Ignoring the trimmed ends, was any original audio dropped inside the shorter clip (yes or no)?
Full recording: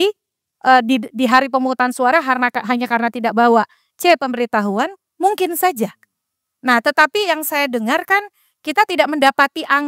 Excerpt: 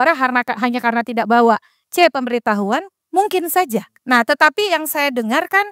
yes